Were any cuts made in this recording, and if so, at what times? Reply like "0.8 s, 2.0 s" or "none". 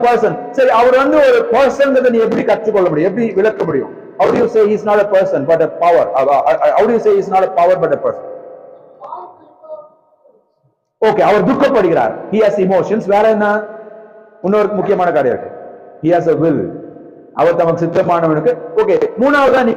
none